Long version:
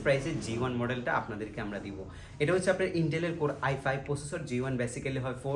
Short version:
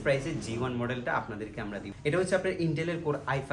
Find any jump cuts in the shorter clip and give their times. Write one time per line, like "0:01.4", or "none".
0:01.9